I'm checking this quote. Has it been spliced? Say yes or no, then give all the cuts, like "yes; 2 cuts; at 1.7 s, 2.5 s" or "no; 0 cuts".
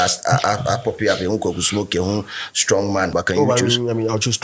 yes; 1 cut; at 3.1 s